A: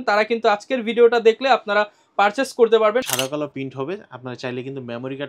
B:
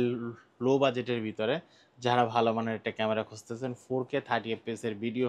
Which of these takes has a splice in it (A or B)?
A